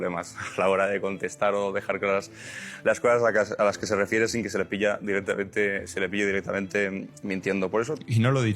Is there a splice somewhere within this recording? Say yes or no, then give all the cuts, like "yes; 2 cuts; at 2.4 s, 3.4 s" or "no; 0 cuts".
no; 0 cuts